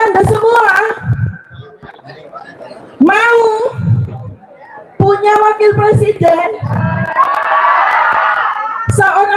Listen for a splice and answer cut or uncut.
uncut